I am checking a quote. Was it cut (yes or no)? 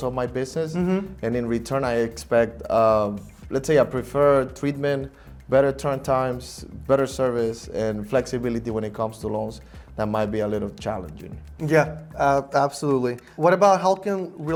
no